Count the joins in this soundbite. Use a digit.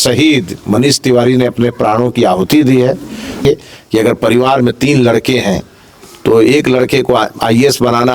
1